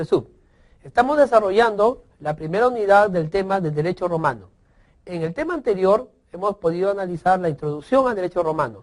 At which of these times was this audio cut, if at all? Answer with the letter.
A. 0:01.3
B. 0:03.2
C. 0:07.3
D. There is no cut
A